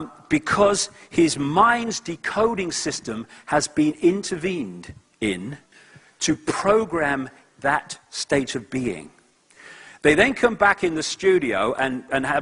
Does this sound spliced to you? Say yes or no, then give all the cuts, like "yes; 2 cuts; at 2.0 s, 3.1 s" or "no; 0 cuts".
yes; 1 cut; at 5.0 s